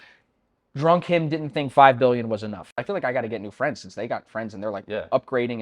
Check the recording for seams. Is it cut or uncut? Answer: cut